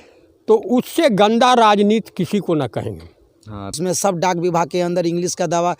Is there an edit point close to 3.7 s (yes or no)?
yes